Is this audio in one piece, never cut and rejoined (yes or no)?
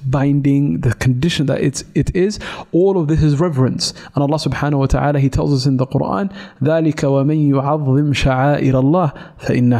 yes